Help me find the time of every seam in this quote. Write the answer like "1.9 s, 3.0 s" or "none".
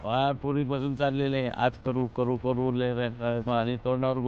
none

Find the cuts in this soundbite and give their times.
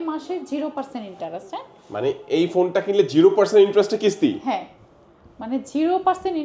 none

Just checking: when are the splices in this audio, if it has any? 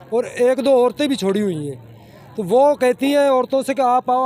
none

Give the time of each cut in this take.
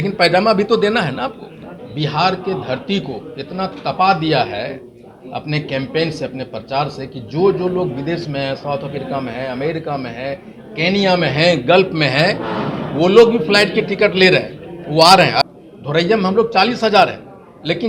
1.8 s, 15.5 s

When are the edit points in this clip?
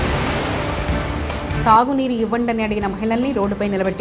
1.5 s

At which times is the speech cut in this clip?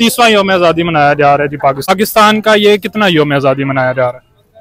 1.9 s

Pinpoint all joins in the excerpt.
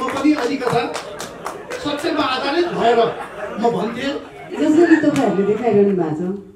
4.4 s

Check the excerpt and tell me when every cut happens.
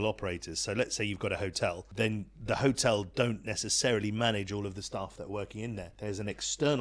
1.8 s, 5.9 s

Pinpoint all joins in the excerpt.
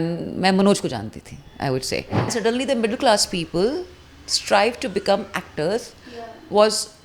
2.3 s

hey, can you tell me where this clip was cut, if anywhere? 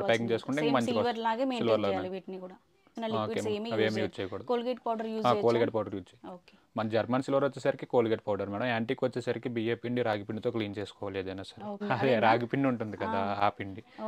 3.0 s, 11.8 s

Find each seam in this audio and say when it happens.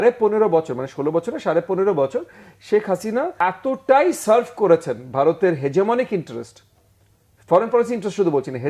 3.3 s

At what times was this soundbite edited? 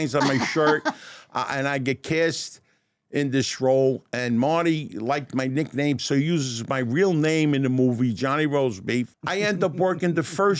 9.2 s

